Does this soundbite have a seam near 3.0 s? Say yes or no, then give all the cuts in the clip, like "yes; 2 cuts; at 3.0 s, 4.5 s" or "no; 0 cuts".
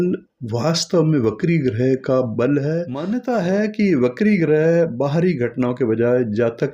yes; 1 cut; at 3.0 s